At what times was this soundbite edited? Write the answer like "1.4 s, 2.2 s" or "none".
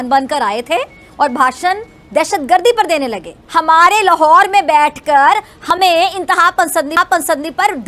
3.4 s